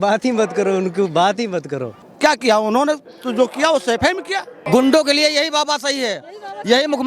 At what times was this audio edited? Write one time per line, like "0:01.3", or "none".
0:01.9
0:04.6

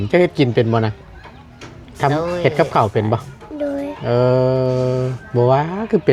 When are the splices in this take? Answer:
none

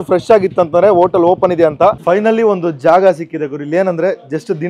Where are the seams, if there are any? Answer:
0:02.0

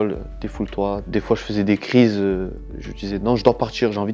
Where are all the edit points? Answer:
0:01.0

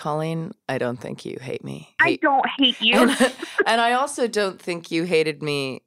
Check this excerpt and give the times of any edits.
0:01.9

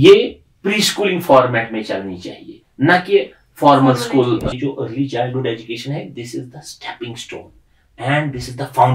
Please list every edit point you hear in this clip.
0:04.5

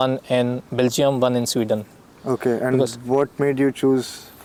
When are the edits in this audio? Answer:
none

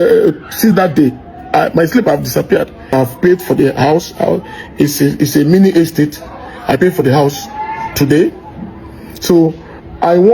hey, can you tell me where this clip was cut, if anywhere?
0:02.9

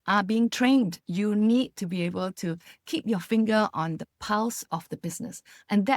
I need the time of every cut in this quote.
0:01.0

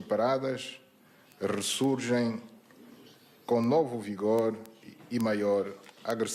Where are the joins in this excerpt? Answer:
none

